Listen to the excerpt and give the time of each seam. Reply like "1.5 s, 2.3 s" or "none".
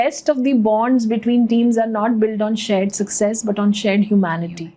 none